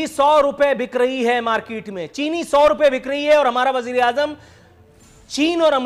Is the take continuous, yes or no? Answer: yes